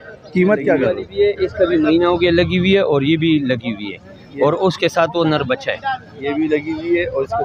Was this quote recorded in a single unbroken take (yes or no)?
no